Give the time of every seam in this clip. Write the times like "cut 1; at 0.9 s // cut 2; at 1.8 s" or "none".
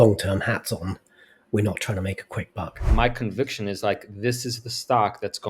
cut 1; at 2.8 s